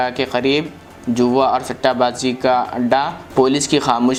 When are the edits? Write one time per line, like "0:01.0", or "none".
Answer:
none